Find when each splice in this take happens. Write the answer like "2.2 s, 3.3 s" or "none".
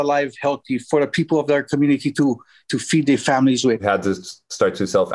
3.8 s